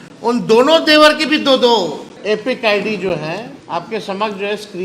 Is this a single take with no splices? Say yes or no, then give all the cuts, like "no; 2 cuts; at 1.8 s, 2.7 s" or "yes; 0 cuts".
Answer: no; 2 cuts; at 2.1 s, 3.5 s